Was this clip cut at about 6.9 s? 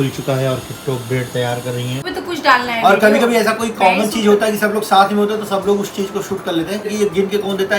yes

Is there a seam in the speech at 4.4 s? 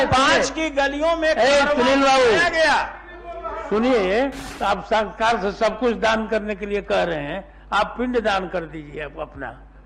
yes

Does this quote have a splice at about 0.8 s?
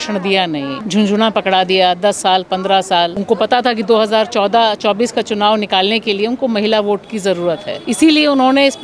yes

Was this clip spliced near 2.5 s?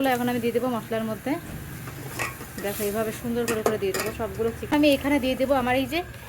no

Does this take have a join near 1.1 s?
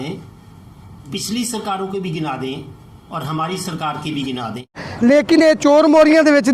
no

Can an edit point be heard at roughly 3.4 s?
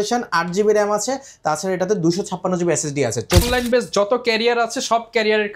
yes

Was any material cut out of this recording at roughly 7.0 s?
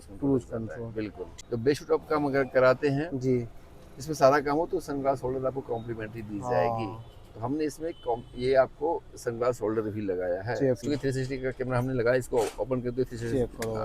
no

